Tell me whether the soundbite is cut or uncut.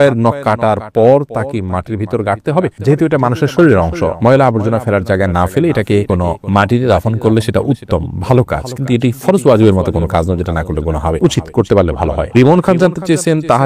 uncut